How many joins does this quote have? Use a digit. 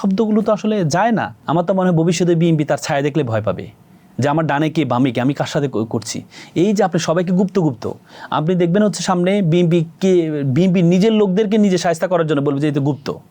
1